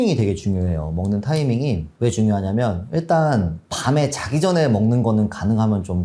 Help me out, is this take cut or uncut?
uncut